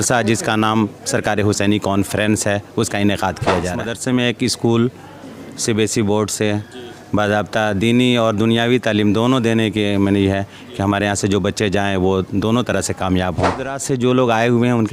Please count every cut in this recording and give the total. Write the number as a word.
two